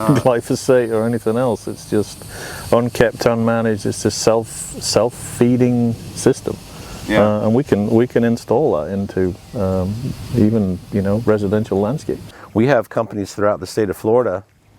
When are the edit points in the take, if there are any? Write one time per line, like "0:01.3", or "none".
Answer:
0:12.3